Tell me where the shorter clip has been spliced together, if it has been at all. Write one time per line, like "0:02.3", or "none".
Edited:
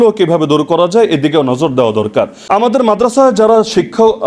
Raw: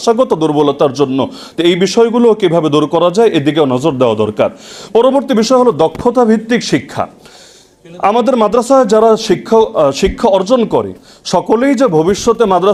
0:02.4